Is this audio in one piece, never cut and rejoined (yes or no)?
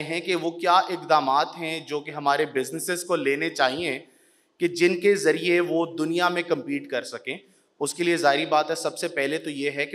yes